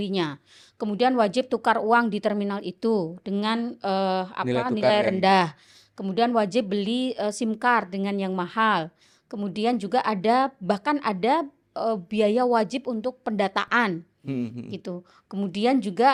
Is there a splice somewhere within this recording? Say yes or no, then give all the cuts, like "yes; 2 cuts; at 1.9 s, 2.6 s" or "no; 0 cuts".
no; 0 cuts